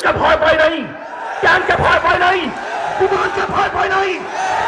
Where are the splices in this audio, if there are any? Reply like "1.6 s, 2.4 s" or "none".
none